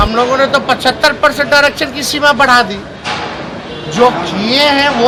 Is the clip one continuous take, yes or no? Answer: yes